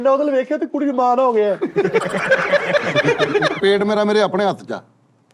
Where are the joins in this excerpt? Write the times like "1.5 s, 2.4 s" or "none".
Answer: 3.6 s